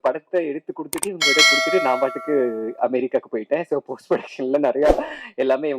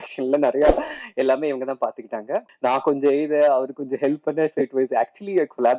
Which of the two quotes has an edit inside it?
second; 1 cut; at 2.5 s

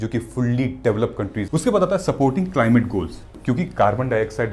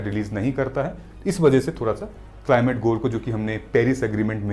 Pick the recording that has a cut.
first; 1 cut; at 1.5 s

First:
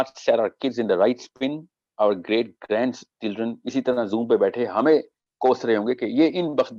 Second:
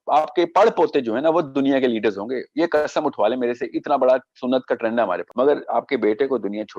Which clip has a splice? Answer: second; 1 cut; at 5.3 s

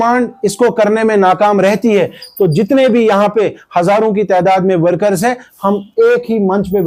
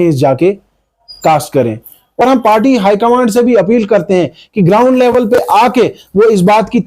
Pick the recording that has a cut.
second; 1 cut; at 2.2 s

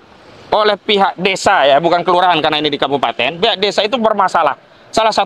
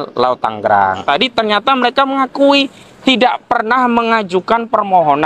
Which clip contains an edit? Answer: second; 1 cut; at 1.0 s

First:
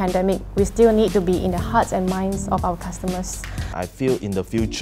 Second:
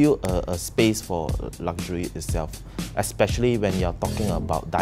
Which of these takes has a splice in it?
first; 1 cut; at 3.7 s

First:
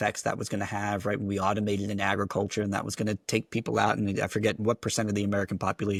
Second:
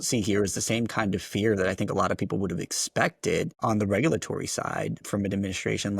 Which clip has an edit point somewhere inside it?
second; 2 cuts; at 3.5 s, 5.0 s

